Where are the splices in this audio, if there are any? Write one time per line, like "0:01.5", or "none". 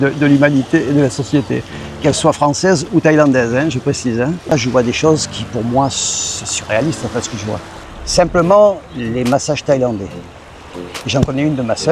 0:04.5
0:07.7